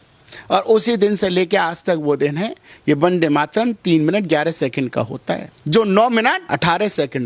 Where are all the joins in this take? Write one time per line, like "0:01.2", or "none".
0:05.5
0:06.4